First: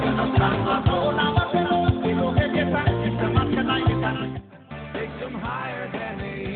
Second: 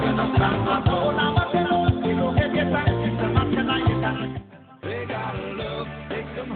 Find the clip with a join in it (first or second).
first